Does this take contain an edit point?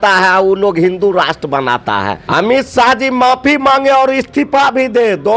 yes; 1 cut; at 2.2 s

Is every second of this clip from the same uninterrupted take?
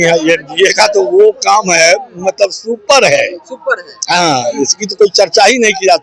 yes; 0 cuts

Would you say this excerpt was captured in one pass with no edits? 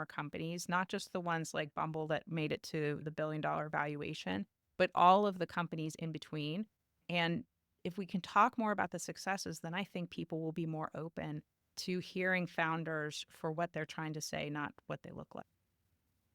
yes; 0 cuts

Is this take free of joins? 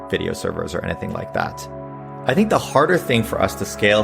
no; 1 cut; at 2.0 s

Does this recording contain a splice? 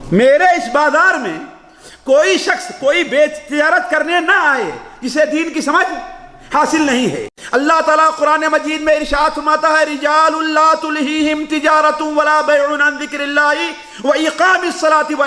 yes; 1 cut; at 7.3 s

